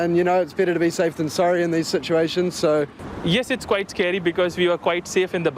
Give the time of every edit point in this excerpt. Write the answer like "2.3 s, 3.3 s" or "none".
3.0 s